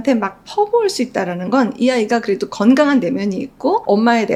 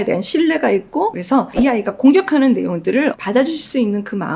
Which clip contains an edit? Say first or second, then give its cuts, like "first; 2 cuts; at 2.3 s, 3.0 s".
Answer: second; 2 cuts; at 1.2 s, 3.2 s